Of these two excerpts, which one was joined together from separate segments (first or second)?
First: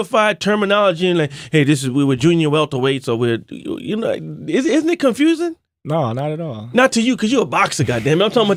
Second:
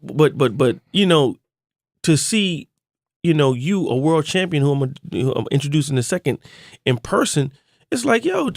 second